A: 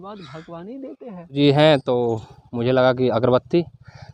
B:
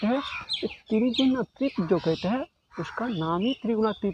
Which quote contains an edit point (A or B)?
A